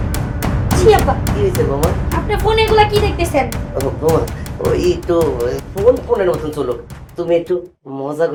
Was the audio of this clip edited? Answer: no; 0 cuts

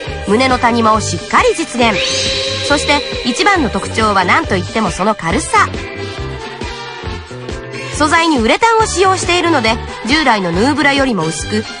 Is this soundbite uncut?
no; 2 cuts; at 6.1 s, 8.0 s

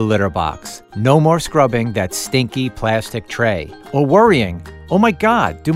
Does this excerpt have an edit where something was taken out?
no; 0 cuts

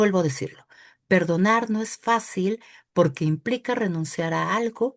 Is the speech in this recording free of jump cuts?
yes; 0 cuts

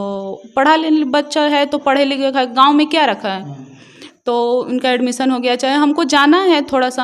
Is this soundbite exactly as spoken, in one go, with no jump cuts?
yes; 0 cuts

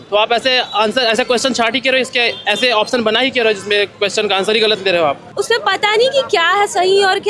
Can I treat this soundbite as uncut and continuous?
no; 1 cut; at 5.2 s

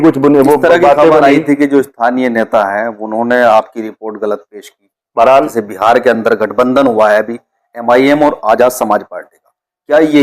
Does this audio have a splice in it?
yes; 1 cut; at 5.5 s

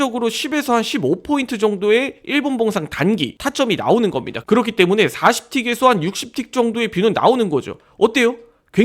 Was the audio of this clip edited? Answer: yes; 1 cut; at 7.8 s

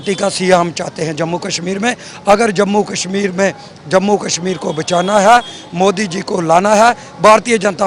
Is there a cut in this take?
no; 0 cuts

